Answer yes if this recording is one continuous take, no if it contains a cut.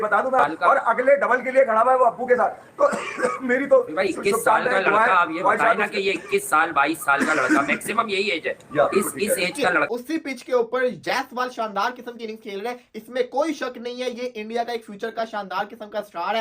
no